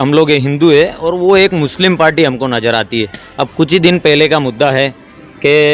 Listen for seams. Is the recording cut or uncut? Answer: uncut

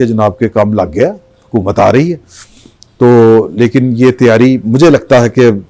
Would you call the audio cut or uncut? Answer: uncut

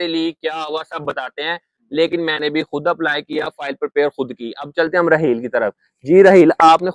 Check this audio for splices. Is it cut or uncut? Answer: uncut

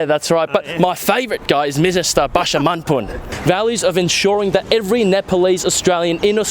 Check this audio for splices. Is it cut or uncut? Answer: cut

